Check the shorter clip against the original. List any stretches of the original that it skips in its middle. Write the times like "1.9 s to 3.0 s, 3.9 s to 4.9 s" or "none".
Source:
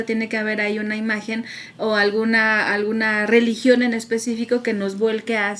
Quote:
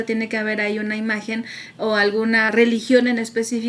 2.5 s to 3.2 s